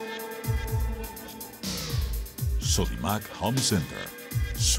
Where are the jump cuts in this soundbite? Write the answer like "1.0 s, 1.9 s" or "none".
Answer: 0.9 s